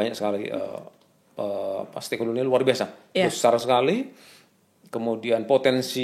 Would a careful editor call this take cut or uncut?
uncut